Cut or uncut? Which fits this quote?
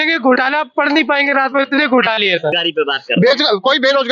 cut